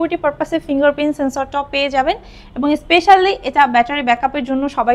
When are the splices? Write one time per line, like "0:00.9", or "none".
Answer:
none

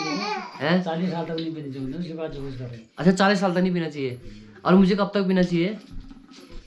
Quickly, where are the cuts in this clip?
none

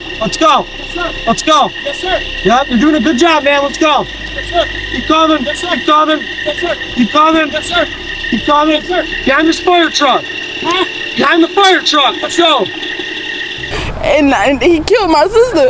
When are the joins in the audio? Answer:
0:13.7

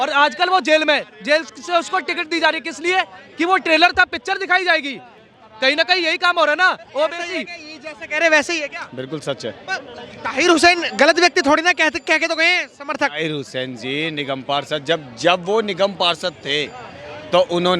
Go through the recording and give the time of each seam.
none

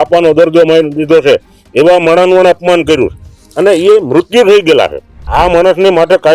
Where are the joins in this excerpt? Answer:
0:05.3

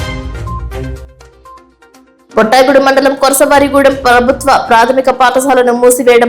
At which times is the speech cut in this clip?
0:01.8

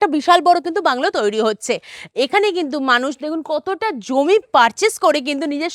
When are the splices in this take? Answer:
none

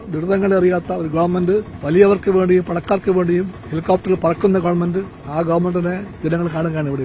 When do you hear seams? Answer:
0:01.7
0:03.6
0:05.2
0:06.1

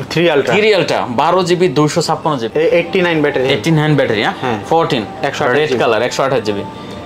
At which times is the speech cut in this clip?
0:02.5

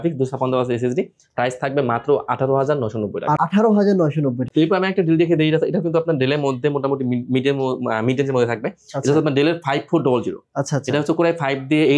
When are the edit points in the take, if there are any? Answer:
none

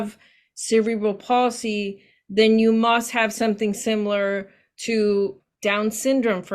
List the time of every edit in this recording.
0:05.5

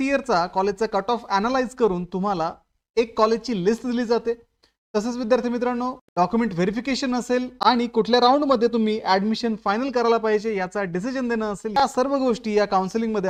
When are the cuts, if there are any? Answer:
none

